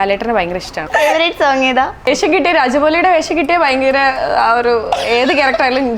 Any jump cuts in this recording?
yes; 2 cuts; at 0.9 s, 2.1 s

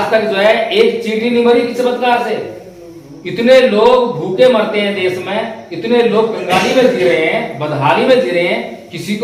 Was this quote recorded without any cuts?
yes; 0 cuts

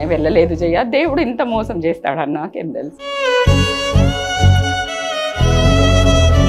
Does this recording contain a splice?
no; 0 cuts

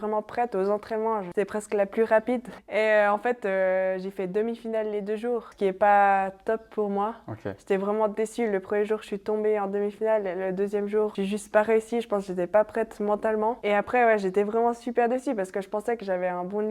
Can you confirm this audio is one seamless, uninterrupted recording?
no; 5 cuts; at 1.3 s, 2.5 s, 5.5 s, 11.1 s, 13.6 s

